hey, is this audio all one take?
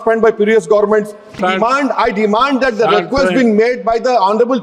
no; 1 cut; at 1.4 s

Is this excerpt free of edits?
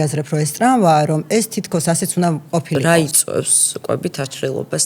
no; 1 cut; at 2.8 s

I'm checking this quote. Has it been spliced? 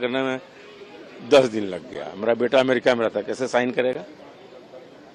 no; 0 cuts

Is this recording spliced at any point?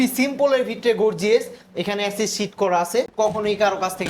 yes; 1 cut; at 3.1 s

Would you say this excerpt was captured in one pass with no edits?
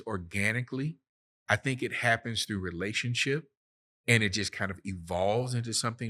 yes; 0 cuts

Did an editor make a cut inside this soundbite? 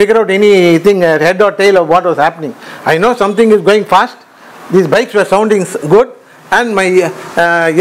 no; 0 cuts

